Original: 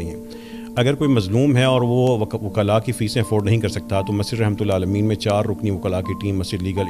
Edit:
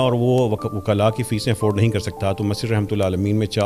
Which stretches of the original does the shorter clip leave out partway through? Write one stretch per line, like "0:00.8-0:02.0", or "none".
none